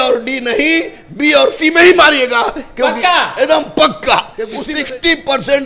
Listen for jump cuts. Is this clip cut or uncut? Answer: cut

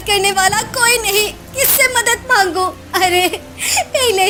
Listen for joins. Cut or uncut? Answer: uncut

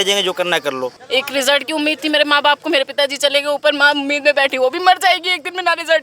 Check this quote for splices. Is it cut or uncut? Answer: cut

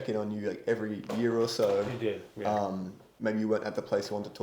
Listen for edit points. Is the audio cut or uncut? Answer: uncut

